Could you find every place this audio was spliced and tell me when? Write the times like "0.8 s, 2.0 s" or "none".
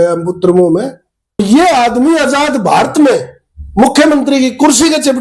1.4 s